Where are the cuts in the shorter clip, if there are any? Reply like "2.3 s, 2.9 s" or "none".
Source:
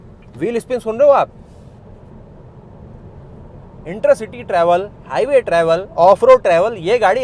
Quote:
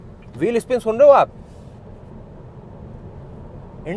none

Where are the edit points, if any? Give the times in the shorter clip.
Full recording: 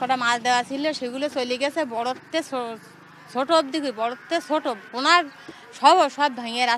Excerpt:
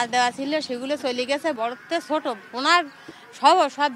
1.6 s

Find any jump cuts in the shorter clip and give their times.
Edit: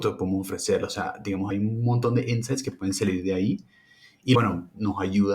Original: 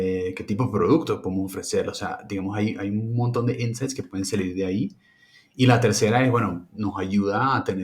1.5 s, 4.3 s

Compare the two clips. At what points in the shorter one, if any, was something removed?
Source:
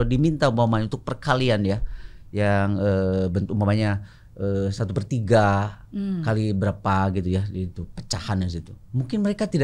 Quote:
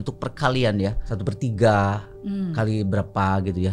1.1 s

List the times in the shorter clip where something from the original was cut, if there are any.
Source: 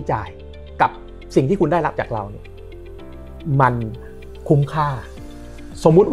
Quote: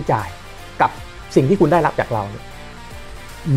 none

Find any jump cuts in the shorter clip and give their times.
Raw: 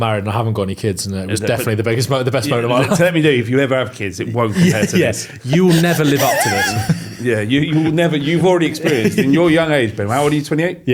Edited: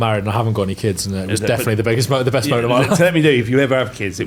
none

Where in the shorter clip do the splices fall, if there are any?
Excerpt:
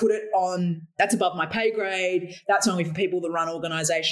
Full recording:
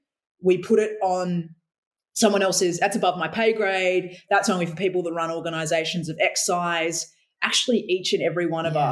0.9 s

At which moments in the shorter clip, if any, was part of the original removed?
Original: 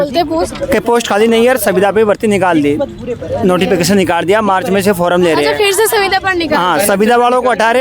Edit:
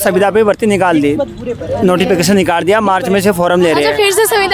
none

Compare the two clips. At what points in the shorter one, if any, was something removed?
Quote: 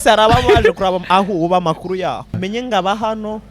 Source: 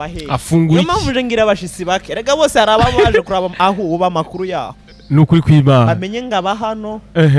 2.5 s

